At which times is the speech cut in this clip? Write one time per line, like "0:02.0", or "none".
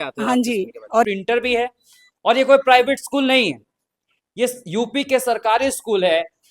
0:01.0